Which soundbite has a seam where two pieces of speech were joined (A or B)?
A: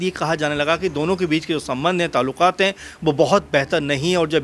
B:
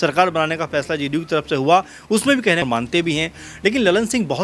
B